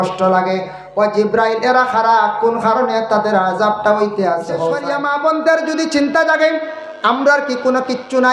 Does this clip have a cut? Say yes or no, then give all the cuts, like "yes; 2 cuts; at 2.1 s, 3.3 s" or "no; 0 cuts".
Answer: yes; 1 cut; at 4.9 s